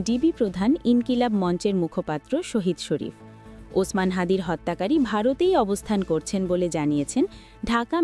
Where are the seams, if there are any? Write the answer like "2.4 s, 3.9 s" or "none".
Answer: none